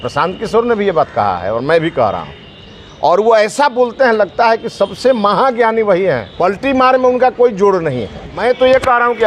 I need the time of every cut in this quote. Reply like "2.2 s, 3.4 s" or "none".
6.3 s, 8.2 s